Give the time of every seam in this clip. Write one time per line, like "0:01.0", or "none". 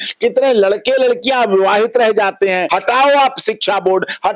0:02.7